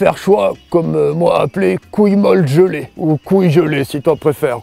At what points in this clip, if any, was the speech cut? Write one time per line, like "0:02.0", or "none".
0:02.9